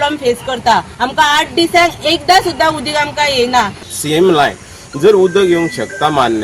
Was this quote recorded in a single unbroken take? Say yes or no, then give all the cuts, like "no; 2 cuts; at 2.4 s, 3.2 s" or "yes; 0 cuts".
no; 2 cuts; at 0.9 s, 3.9 s